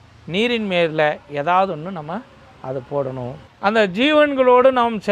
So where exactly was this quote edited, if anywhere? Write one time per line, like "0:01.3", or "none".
0:03.4